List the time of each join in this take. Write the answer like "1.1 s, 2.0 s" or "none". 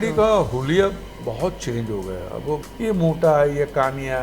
2.6 s

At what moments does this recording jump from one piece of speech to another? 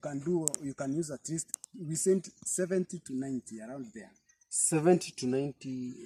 none

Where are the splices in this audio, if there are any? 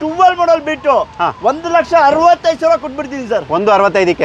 none

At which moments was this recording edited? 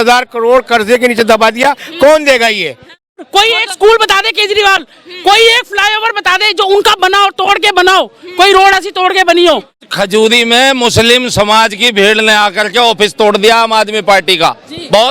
3.1 s, 9.8 s

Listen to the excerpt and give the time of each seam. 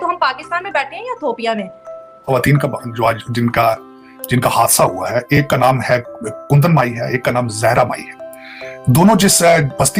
none

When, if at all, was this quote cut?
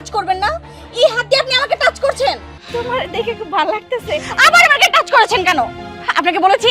2.6 s

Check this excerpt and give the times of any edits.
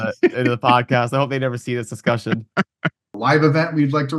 3.0 s

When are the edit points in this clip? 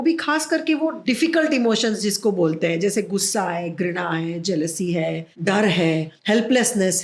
1.0 s, 5.3 s, 6.1 s

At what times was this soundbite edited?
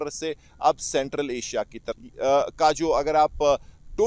none

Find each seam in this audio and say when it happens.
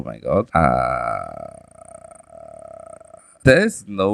none

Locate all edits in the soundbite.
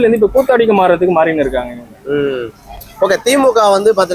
none

